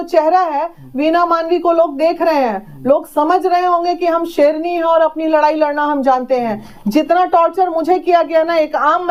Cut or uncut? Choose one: uncut